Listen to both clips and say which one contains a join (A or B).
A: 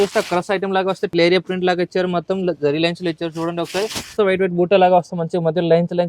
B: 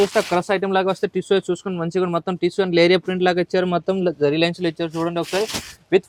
A